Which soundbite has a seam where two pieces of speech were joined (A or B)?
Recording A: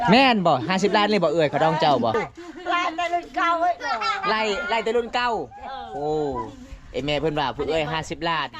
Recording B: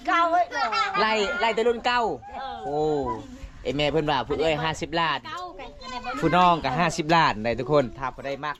A